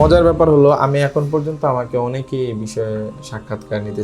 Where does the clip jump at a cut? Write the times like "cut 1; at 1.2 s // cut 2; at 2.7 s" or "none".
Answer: none